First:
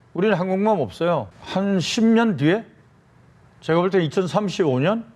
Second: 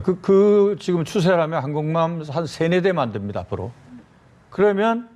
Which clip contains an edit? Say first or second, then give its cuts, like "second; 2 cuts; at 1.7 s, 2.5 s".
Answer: first; 1 cut; at 1.4 s